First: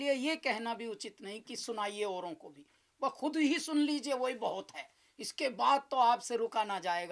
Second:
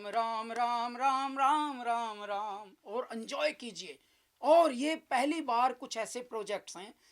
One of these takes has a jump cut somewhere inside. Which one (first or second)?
second